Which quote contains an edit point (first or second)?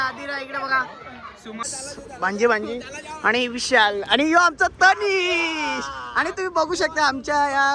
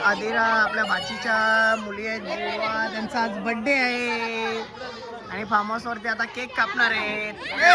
first